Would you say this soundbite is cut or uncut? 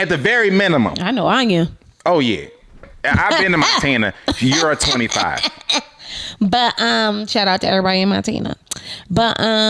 uncut